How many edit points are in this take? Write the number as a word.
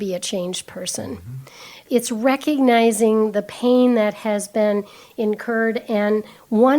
one